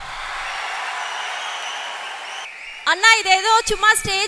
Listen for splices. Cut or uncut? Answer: cut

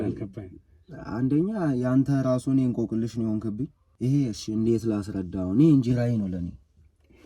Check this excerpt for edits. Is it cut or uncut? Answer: cut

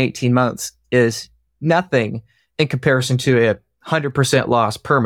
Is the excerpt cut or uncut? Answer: uncut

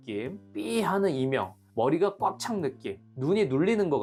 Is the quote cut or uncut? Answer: uncut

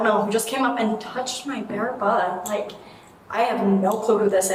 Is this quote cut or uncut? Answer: uncut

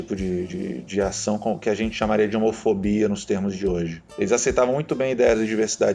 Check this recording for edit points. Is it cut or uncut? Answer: cut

